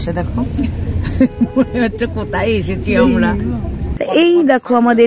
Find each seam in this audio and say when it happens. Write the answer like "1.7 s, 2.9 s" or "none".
3.8 s